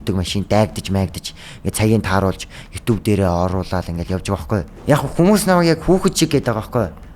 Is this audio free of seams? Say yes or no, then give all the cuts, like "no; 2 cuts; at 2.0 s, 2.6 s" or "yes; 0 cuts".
no; 1 cut; at 4.7 s